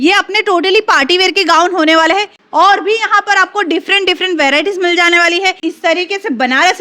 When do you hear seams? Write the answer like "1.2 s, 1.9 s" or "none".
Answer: 2.4 s, 5.6 s